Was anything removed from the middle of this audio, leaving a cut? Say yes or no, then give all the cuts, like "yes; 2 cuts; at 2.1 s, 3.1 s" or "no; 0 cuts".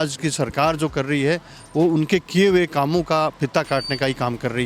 no; 0 cuts